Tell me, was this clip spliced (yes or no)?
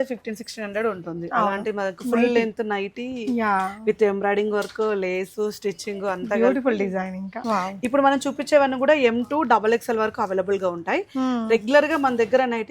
yes